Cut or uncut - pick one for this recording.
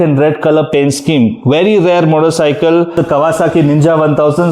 cut